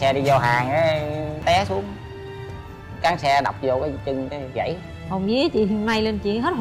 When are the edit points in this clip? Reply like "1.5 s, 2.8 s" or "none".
1.4 s, 4.9 s